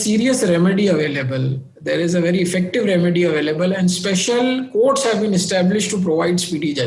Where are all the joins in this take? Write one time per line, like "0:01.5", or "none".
none